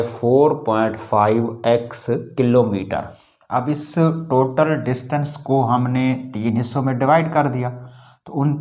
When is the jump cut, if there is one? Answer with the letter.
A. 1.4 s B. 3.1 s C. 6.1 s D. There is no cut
B